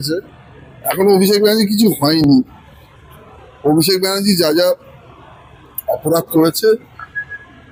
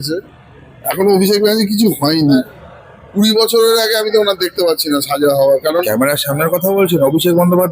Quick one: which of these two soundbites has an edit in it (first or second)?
second